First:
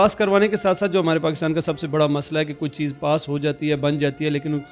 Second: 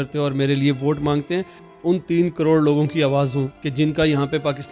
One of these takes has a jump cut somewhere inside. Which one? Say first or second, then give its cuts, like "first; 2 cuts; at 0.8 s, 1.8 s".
second; 2 cuts; at 1.6 s, 3.6 s